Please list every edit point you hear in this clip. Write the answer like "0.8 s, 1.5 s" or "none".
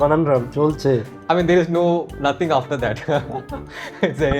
1.1 s